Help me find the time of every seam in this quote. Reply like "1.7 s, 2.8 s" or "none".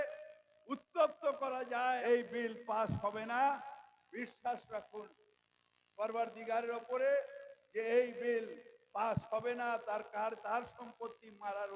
2.0 s